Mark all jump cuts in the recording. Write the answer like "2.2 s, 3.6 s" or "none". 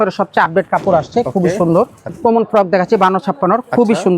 2.1 s